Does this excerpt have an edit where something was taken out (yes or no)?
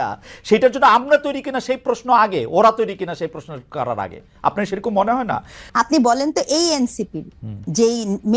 no